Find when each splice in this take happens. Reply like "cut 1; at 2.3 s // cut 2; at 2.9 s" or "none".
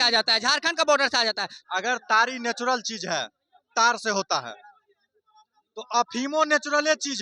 cut 1; at 1.5 s